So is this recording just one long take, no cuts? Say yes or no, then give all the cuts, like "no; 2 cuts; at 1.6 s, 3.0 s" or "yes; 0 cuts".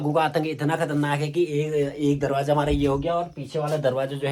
yes; 0 cuts